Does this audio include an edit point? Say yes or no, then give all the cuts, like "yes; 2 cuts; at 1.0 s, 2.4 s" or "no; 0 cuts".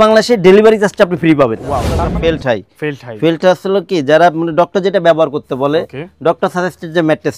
yes; 1 cut; at 1.8 s